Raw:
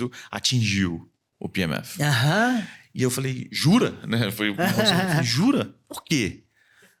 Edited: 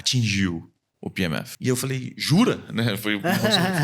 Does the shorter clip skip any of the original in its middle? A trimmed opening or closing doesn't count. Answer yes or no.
yes